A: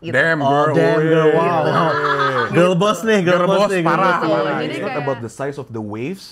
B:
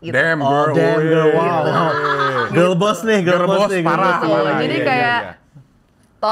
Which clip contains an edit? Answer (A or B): A